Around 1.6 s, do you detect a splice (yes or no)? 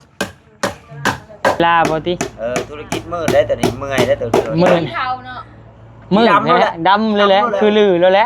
yes